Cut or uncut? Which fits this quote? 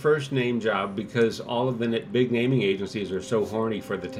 uncut